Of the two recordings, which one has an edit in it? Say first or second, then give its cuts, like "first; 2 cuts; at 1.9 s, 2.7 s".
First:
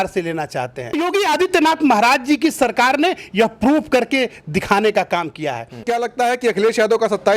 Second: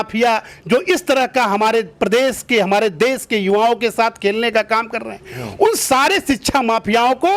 first; 2 cuts; at 1.0 s, 5.8 s